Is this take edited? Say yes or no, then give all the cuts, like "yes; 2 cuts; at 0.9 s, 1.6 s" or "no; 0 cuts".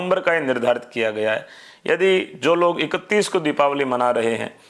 no; 0 cuts